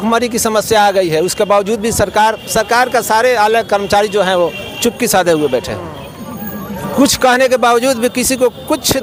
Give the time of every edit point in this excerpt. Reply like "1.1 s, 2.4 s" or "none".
none